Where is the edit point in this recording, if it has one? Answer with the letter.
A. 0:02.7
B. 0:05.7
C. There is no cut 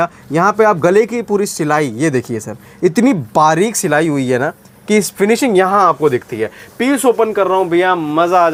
C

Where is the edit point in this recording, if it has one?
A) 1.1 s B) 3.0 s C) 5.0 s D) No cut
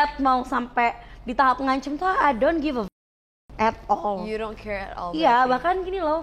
D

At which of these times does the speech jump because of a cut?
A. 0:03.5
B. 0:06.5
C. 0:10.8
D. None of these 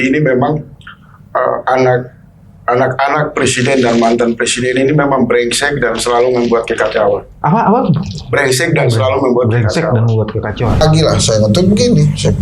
C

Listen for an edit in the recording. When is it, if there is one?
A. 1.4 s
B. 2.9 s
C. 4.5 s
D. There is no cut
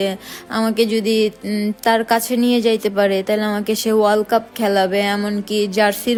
D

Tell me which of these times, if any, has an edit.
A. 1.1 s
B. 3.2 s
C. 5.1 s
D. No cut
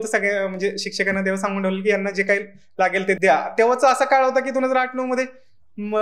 B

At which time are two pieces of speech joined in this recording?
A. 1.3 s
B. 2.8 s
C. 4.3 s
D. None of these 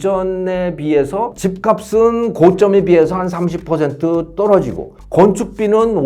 A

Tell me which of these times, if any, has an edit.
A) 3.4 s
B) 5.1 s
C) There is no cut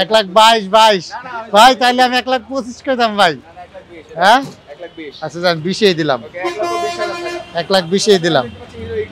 C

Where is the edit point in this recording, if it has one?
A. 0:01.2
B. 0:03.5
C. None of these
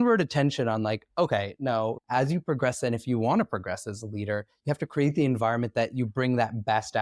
C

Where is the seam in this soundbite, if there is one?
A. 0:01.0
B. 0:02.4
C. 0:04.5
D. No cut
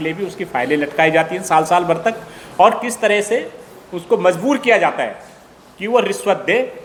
D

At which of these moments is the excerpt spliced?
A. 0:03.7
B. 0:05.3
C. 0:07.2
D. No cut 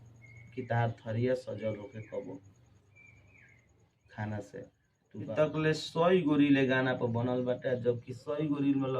B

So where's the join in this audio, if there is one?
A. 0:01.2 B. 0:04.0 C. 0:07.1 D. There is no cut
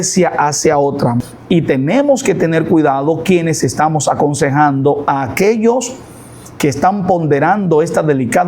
A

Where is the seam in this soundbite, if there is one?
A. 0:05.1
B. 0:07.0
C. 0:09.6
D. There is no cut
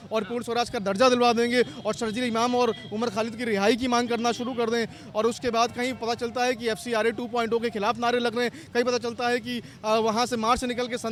D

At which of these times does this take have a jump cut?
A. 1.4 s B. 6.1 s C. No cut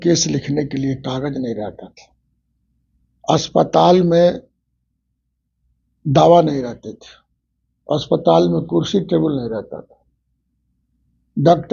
C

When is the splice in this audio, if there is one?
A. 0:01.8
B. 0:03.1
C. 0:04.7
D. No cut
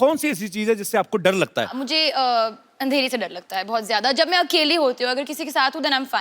A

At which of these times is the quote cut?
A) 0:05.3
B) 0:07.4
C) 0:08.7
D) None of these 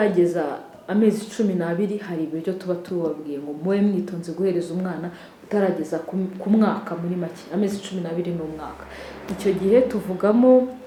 D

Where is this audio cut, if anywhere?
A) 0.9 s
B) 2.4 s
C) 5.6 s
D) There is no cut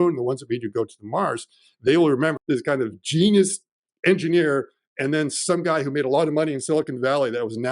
B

